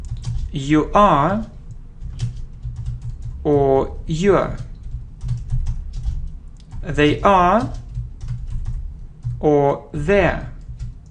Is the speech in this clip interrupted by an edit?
yes; 1 cut; at 4.0 s

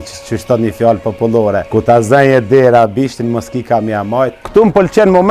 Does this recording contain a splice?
yes; 2 cuts; at 1.6 s, 4.4 s

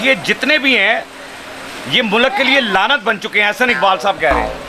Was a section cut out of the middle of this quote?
no; 0 cuts

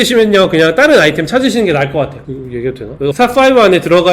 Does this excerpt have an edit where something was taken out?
yes; 1 cut; at 3.1 s

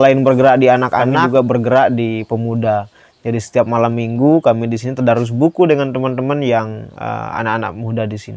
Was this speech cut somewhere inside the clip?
yes; 1 cut; at 1.1 s

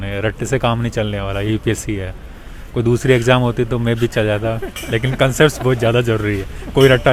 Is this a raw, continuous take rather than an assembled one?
yes; 0 cuts

